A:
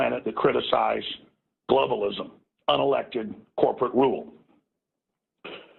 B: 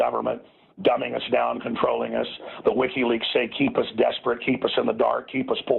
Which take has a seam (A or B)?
B